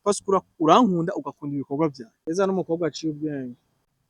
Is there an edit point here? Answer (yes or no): yes